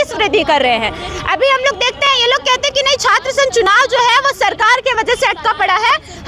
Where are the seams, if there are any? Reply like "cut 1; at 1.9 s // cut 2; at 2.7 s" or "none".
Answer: none